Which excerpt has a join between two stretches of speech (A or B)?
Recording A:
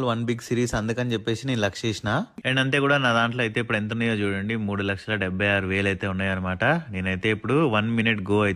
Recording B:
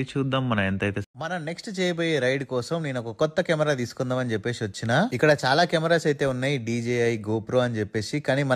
B